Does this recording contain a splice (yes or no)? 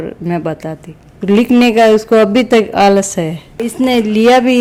no